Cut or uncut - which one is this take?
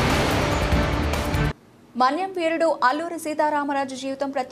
cut